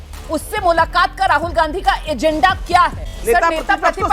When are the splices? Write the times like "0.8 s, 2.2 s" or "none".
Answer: 3.1 s